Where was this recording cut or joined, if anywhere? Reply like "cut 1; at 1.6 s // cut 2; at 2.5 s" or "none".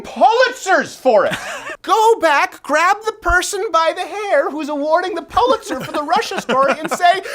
cut 1; at 1.7 s